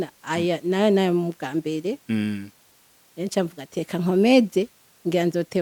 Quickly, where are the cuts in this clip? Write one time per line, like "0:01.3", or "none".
none

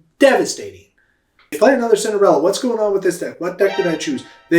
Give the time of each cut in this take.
0:01.4

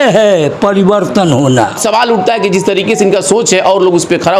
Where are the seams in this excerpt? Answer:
none

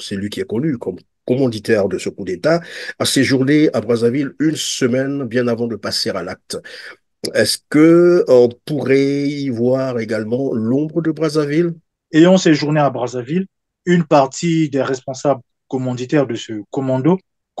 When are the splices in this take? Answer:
0:11.9

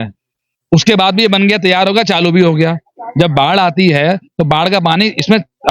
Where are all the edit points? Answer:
none

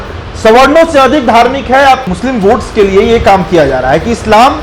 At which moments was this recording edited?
0:02.1

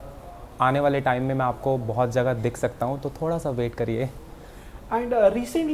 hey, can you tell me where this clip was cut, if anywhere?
none

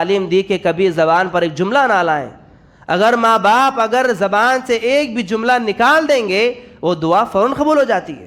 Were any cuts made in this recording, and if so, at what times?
none

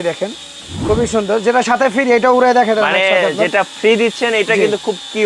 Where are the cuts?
none

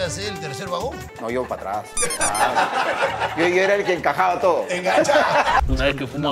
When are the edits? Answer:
0:01.0
0:05.6

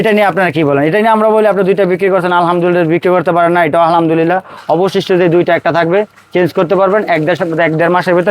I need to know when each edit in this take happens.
none

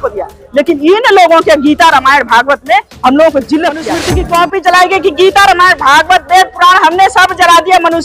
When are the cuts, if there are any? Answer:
0:04.0

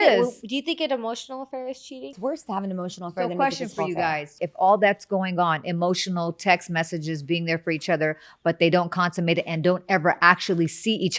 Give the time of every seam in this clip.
0:02.2
0:04.4

